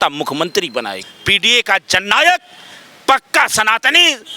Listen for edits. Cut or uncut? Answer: cut